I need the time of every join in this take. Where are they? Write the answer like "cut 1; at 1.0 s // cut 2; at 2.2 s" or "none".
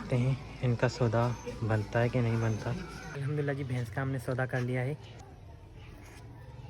cut 1; at 3.1 s // cut 2; at 5.1 s

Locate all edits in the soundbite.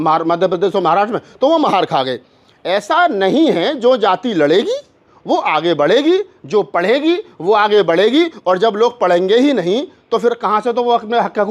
none

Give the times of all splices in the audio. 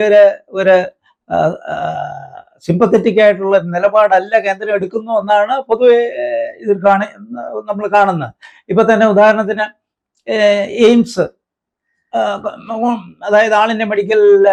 none

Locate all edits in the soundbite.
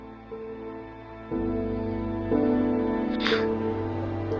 none

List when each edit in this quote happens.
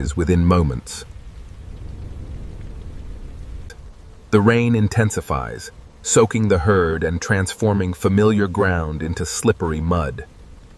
none

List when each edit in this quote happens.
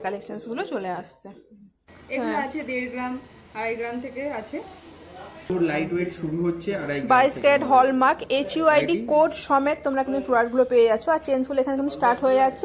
cut 1; at 1.9 s // cut 2; at 5.5 s

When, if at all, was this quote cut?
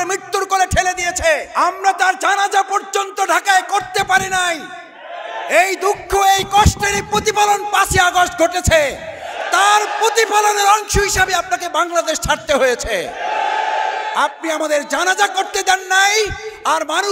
cut 1; at 1.5 s

